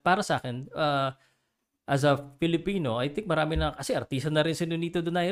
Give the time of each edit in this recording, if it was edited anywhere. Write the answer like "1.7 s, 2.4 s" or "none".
none